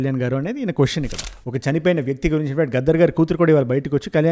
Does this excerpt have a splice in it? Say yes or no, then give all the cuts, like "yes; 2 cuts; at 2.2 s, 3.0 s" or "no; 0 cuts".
yes; 1 cut; at 1.2 s